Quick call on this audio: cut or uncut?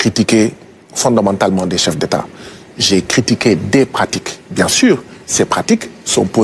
uncut